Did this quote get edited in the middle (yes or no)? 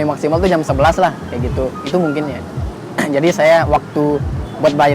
no